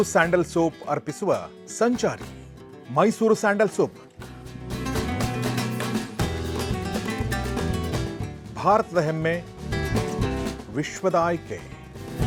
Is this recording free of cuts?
yes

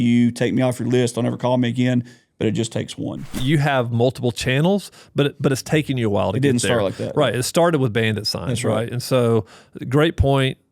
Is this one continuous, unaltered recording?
no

